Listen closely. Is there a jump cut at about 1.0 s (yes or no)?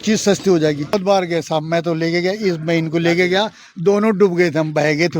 yes